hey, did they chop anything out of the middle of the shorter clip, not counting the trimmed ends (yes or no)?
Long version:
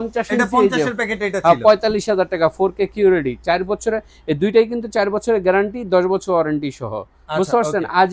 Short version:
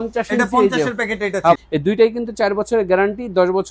yes